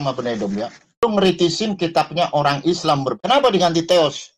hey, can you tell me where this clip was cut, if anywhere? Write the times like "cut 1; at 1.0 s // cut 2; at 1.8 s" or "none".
cut 1; at 1.0 s // cut 2; at 3.2 s